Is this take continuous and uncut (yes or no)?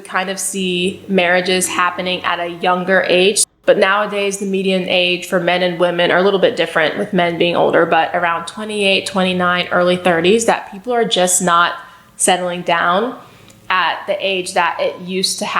no